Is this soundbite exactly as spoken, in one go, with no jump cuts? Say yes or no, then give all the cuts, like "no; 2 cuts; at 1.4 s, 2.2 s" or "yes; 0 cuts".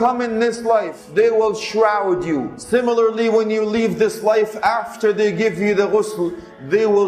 no; 2 cuts; at 1.0 s, 2.5 s